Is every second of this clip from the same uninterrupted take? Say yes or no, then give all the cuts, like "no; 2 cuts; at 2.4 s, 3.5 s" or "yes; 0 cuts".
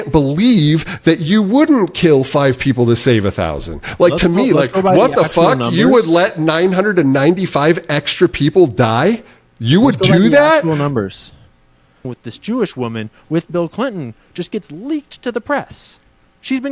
no; 1 cut; at 12.0 s